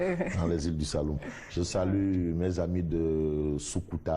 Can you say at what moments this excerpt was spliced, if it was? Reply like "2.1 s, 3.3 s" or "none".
1.3 s